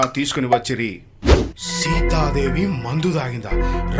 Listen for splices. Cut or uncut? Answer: uncut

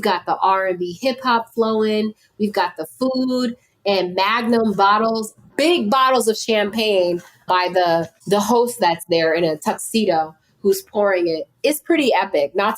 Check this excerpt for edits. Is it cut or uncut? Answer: cut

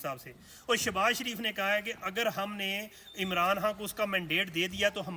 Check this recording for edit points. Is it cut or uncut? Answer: uncut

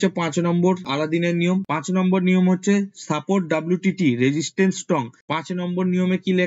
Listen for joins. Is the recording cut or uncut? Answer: cut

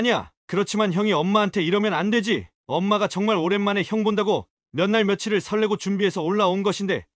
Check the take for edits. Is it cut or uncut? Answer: uncut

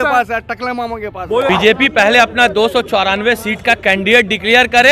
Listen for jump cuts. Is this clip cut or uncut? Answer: cut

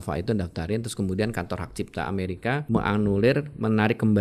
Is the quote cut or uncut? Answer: cut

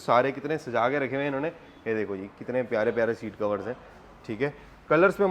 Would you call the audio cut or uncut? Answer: uncut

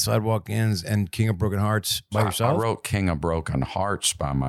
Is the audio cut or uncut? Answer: cut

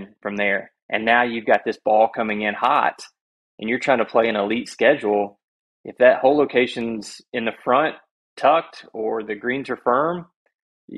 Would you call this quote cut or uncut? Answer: uncut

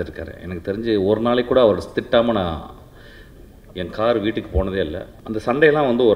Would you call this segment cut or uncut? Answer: cut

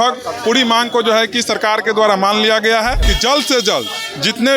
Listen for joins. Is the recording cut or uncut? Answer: cut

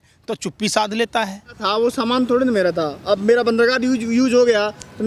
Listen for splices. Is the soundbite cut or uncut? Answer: cut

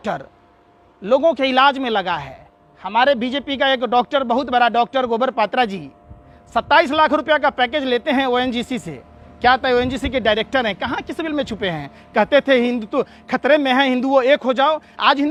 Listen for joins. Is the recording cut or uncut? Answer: uncut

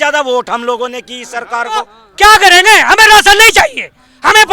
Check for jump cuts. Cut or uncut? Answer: cut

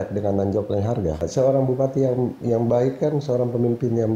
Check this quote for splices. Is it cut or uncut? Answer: cut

